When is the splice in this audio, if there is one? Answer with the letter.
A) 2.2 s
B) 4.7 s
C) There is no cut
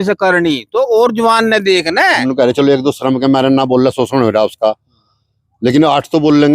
A